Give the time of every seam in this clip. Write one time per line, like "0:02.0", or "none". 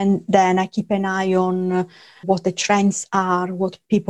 0:02.2